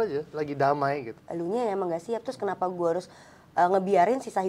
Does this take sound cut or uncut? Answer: cut